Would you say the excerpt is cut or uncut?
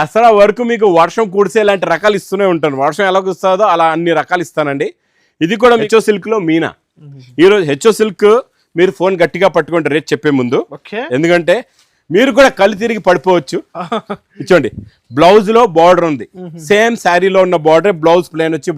cut